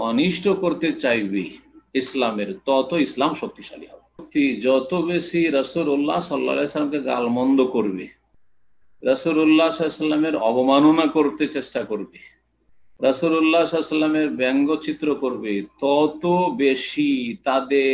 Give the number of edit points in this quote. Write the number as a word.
one